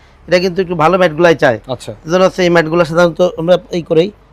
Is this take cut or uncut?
uncut